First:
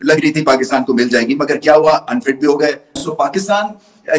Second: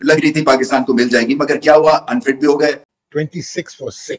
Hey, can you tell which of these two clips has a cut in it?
second; 1 cut; at 2.9 s

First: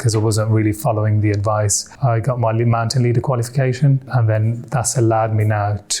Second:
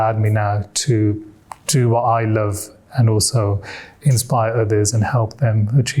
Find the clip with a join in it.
first; 2 cuts; at 1.8 s, 4.1 s

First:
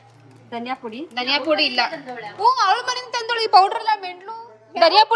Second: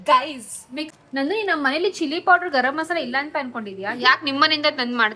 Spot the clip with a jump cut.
second; 1 cut; at 0.9 s

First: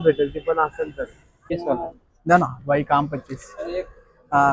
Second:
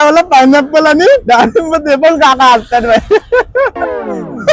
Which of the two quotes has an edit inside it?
first; 1 cut; at 1.5 s

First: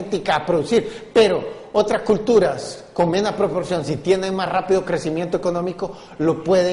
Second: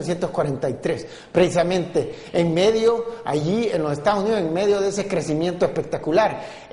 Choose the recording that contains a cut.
second; 1 cut; at 4.6 s

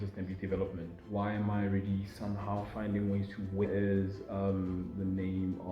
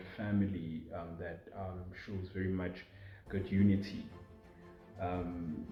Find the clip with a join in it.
first; 1 cut; at 3.7 s

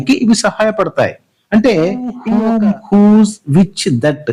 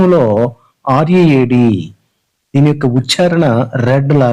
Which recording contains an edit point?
first; 1 cut; at 2.2 s

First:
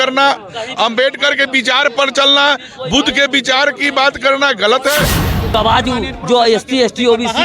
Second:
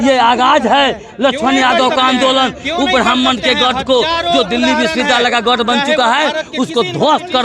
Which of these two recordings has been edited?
first; 1 cut; at 5.5 s

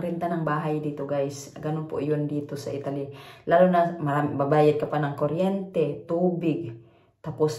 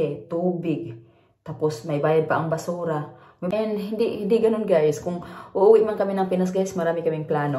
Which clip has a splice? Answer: second; 1 cut; at 3.5 s

